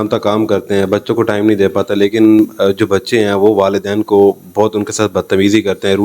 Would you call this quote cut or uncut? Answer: uncut